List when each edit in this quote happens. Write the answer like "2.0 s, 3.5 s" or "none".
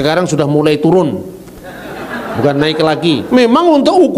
3.2 s